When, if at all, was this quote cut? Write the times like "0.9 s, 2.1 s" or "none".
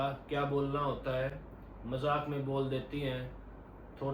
none